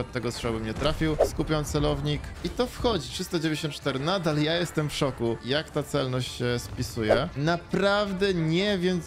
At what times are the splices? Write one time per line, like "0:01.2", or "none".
0:01.2
0:02.3
0:07.3